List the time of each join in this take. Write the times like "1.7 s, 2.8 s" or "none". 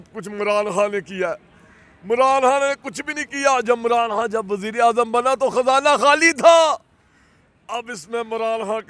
none